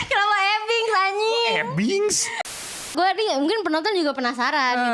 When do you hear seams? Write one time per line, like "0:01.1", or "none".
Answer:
0:02.7